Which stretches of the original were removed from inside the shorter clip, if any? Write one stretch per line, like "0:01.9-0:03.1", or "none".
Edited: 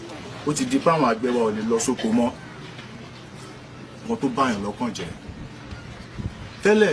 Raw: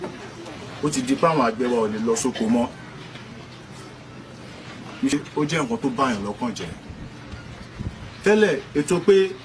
0:04.4-0:05.7